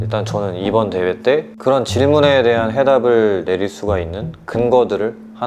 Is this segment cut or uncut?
cut